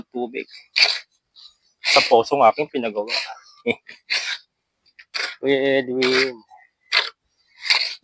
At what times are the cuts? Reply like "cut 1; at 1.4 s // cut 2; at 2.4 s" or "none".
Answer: none